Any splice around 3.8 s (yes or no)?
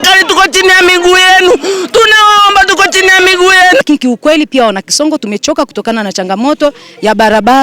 yes